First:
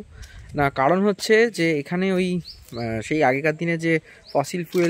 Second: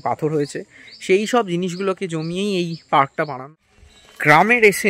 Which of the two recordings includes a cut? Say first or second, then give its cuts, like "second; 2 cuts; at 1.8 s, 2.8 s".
second; 1 cut; at 3.5 s